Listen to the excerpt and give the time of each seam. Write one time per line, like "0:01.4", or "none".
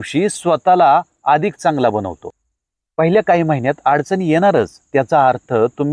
0:02.2